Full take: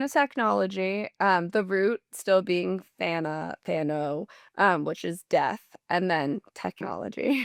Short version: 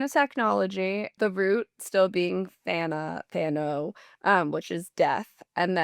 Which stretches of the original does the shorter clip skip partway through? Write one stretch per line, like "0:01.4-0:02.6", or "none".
0:01.1-0:01.5